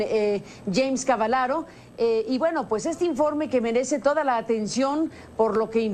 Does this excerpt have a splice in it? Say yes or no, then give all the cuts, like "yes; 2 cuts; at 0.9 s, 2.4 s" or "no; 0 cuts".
yes; 1 cut; at 2.3 s